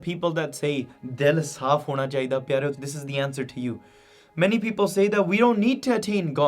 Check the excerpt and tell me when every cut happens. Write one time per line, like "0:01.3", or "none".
0:02.8